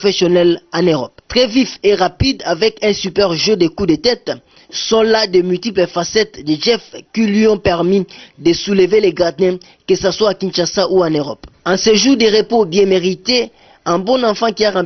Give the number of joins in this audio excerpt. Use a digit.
0